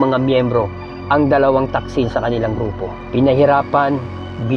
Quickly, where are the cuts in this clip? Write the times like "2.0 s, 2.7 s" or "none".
none